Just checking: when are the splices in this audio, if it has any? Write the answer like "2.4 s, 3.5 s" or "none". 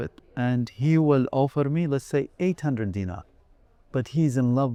none